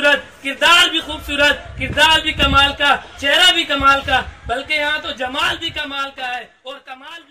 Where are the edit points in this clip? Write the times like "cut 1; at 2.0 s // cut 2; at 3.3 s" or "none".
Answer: none